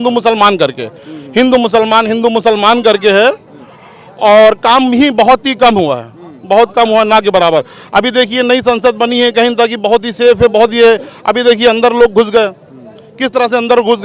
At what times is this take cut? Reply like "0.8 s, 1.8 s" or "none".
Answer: none